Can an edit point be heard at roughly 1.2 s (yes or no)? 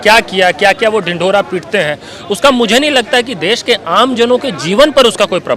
no